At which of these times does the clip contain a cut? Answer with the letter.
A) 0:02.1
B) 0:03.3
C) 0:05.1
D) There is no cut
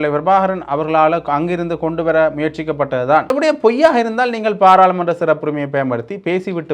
B